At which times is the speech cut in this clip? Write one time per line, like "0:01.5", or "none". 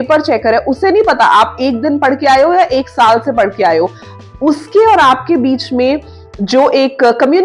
none